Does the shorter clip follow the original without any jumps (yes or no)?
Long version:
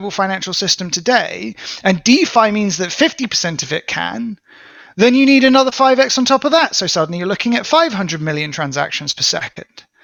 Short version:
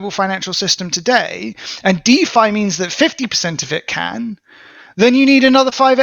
yes